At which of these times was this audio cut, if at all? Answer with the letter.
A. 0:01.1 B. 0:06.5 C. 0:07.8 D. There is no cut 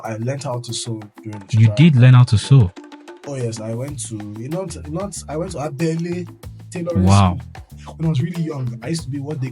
C